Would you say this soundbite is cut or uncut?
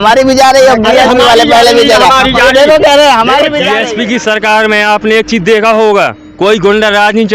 cut